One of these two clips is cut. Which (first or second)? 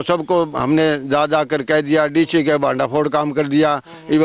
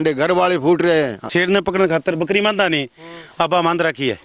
second